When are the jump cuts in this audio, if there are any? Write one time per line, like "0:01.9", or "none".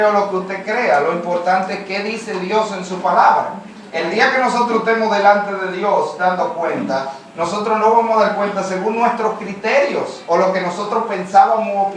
none